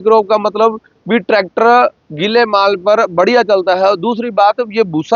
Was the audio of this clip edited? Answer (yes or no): no